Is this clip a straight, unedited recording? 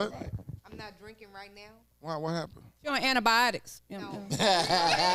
yes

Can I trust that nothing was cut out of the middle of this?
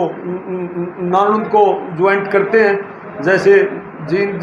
yes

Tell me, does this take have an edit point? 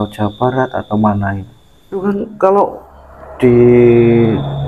yes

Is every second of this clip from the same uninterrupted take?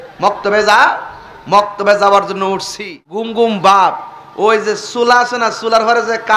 no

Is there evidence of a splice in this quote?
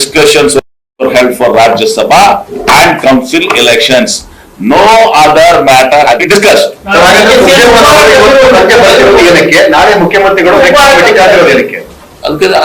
yes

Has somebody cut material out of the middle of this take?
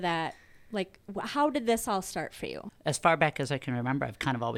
yes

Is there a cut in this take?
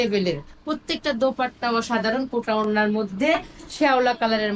yes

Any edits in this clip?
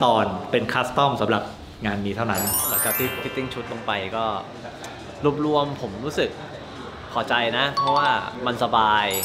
no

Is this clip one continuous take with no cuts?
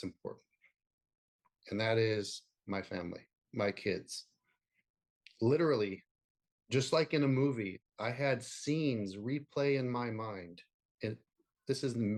yes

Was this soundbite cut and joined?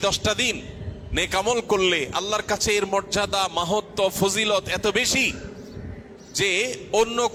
no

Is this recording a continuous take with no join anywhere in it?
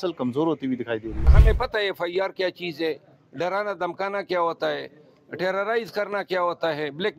no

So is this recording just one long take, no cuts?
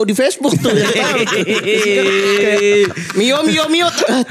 yes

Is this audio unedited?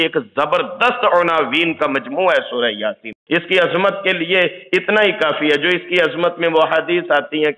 no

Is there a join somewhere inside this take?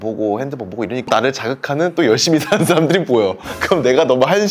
yes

